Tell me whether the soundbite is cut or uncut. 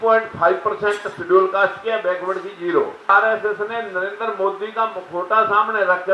cut